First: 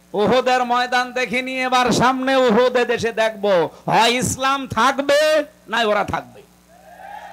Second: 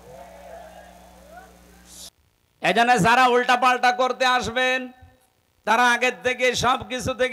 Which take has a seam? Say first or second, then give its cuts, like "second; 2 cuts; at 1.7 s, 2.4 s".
second; 1 cut; at 2.1 s